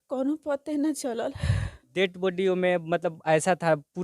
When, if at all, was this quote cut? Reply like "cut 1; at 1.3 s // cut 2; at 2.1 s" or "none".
cut 1; at 1.7 s